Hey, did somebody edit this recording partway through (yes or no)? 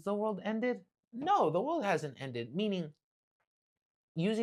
no